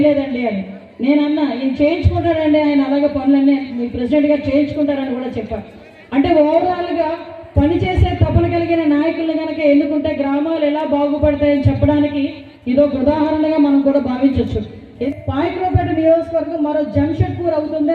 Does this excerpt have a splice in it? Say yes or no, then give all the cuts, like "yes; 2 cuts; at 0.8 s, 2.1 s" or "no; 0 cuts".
yes; 1 cut; at 15.0 s